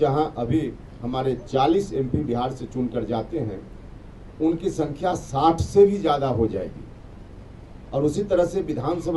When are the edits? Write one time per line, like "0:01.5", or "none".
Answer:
none